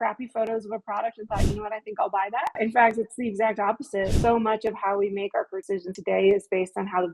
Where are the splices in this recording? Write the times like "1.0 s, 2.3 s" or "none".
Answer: 2.6 s, 4.1 s, 5.8 s